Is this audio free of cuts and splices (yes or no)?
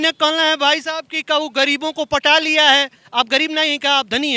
yes